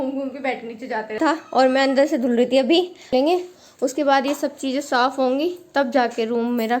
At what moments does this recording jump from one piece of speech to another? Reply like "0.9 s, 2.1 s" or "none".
1.2 s, 3.1 s